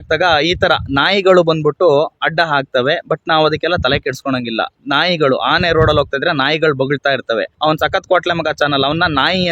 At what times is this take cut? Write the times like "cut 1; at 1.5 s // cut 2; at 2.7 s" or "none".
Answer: none

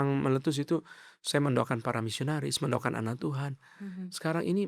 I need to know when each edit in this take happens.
none

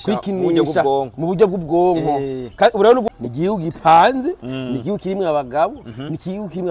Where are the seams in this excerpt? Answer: cut 1; at 3.1 s

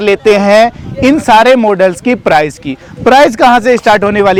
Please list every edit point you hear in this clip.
none

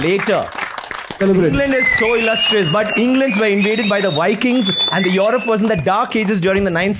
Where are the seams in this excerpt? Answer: cut 1; at 1.2 s

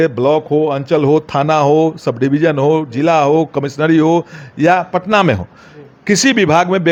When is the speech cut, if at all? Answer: none

